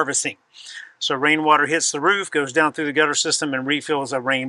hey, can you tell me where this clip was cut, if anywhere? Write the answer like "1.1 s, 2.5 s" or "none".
none